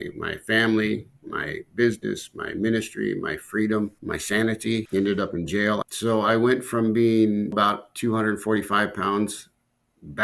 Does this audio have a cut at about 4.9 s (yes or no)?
yes